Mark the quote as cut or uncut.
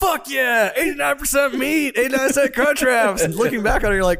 cut